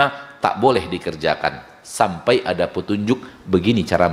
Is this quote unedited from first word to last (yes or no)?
yes